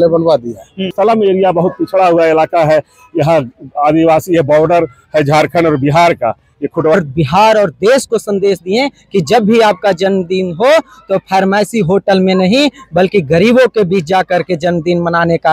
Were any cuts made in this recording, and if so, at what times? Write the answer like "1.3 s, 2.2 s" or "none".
0.9 s, 6.9 s